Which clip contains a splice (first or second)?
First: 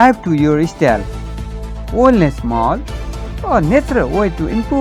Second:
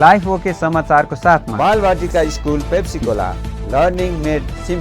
second